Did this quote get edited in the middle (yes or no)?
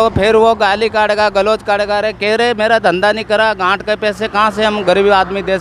no